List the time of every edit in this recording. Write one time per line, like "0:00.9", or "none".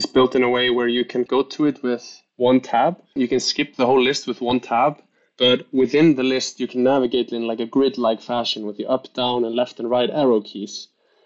0:01.3
0:03.1